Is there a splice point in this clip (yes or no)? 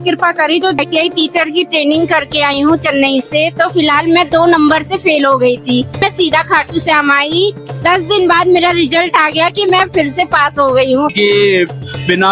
yes